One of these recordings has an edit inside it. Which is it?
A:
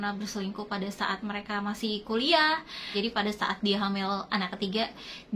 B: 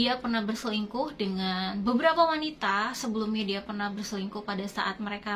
A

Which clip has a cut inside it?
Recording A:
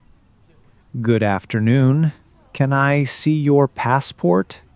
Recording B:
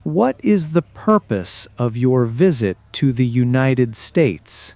A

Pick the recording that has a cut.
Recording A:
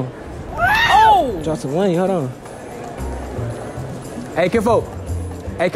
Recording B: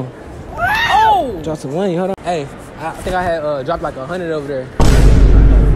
B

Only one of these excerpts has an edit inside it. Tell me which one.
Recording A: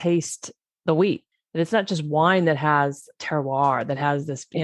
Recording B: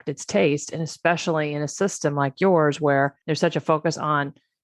A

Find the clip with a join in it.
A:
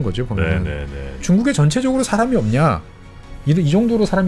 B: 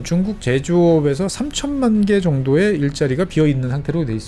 A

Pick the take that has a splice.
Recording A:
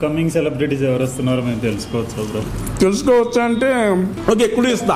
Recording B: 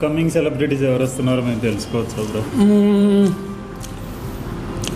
A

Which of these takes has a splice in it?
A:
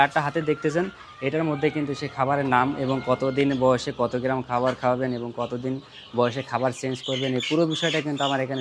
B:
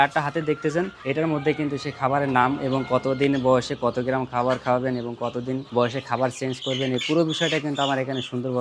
B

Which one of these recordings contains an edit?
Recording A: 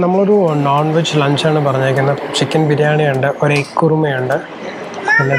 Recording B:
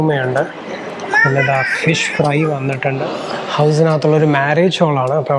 B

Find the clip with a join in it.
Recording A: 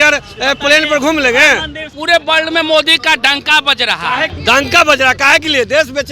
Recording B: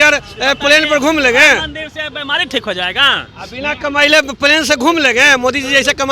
A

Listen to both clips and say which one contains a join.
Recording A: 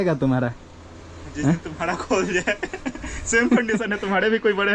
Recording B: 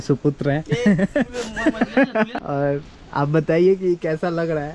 B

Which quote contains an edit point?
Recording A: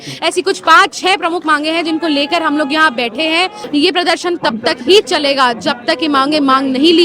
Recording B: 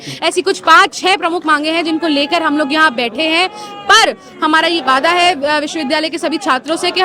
A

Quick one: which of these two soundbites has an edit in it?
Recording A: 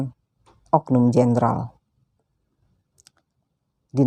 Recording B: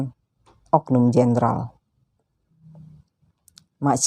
B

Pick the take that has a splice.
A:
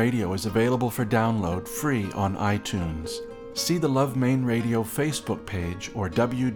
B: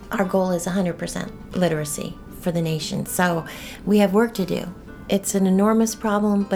B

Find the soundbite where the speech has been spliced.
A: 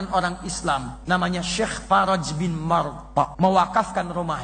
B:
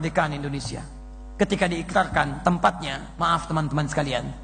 A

